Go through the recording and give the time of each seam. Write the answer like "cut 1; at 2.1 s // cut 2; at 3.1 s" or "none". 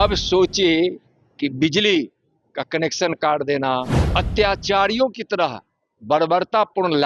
cut 1; at 4.0 s